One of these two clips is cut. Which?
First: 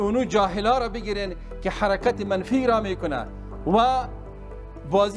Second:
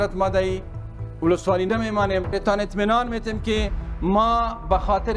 second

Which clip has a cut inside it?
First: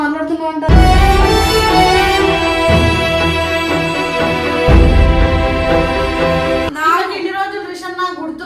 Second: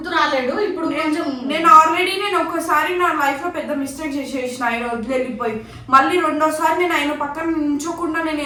first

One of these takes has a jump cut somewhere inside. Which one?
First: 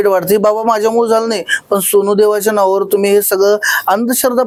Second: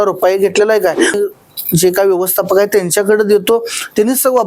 second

